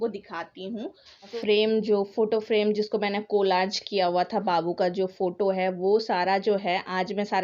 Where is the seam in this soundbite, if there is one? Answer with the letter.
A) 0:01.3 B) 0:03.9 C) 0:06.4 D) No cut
A